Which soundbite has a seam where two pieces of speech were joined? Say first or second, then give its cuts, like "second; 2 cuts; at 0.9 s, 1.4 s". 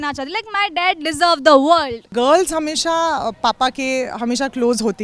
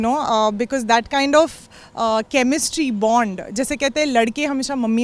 first; 1 cut; at 2.1 s